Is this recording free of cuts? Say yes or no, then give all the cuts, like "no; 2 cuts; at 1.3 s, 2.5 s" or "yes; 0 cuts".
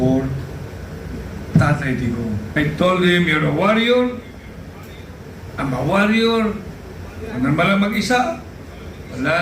no; 1 cut; at 2.6 s